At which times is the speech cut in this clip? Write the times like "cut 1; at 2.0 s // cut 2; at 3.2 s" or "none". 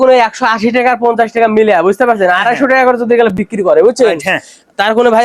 none